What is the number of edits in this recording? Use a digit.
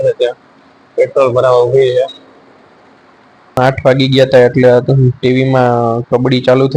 1